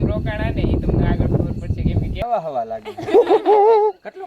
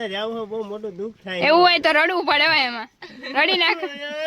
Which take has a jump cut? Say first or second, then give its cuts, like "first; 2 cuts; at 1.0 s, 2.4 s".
first; 1 cut; at 2.2 s